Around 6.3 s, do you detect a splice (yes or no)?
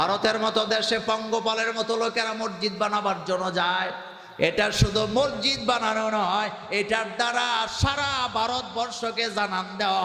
no